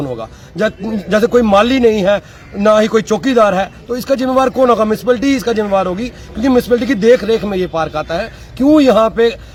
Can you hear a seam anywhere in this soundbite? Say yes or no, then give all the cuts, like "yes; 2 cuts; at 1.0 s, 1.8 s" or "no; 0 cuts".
no; 0 cuts